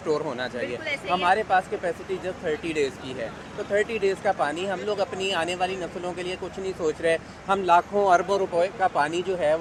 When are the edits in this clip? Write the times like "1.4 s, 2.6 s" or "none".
none